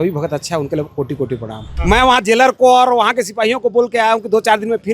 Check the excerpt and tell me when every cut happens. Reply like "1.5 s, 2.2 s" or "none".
1.7 s